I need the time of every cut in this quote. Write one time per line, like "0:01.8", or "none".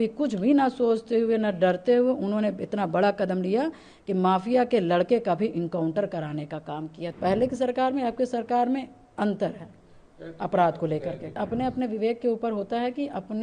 0:07.0
0:11.4